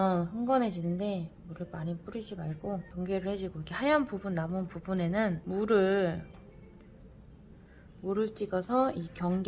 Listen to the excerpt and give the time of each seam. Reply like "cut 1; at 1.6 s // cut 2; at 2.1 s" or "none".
cut 1; at 2.9 s // cut 2; at 5.4 s